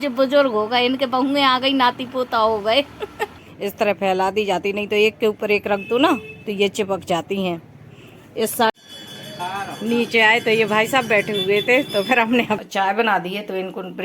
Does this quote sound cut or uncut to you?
cut